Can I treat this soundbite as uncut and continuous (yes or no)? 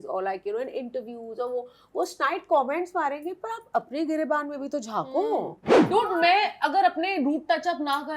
no